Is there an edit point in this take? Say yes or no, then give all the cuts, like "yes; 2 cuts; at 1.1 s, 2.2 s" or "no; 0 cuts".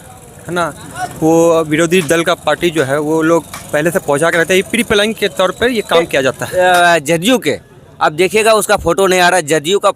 yes; 1 cut; at 6.4 s